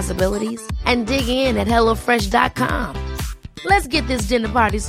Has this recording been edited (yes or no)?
no